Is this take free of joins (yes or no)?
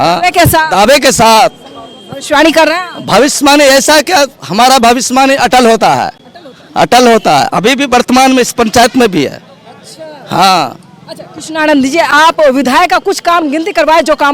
yes